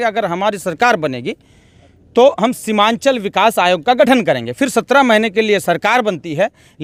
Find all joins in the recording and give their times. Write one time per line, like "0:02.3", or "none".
none